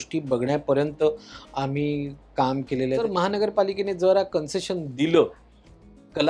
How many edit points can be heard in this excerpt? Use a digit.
1